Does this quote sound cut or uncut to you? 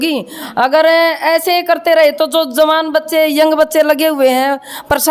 uncut